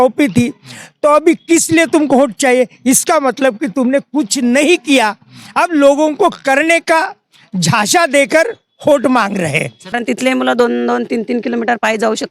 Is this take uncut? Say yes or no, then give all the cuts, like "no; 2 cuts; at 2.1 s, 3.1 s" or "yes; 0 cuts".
no; 1 cut; at 9.8 s